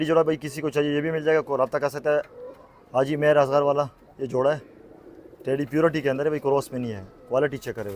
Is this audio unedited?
yes; 0 cuts

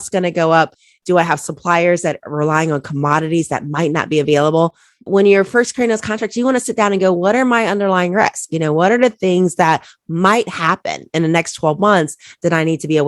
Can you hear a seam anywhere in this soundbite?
no; 0 cuts

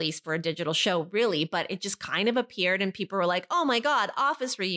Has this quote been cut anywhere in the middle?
no; 0 cuts

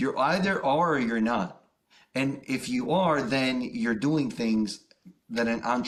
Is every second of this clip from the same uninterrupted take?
yes; 0 cuts

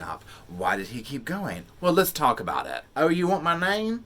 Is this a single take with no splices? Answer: no; 1 cut; at 2.8 s

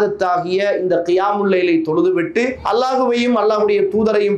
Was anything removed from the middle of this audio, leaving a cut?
yes; 1 cut; at 2.6 s

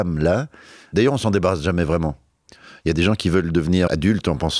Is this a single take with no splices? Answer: no; 3 cuts; at 0.9 s, 3.0 s, 3.9 s

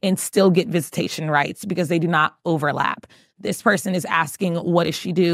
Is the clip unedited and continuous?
yes; 0 cuts

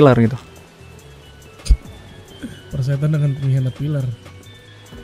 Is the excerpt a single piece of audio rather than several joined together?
yes; 0 cuts

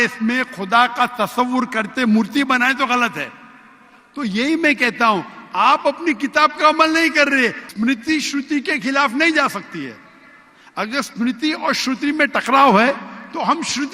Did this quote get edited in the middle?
yes; 1 cut; at 7.6 s

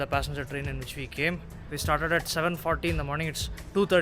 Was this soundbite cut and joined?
yes; 1 cut; at 1.7 s

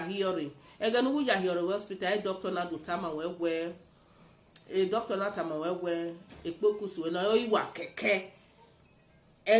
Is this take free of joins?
yes; 0 cuts

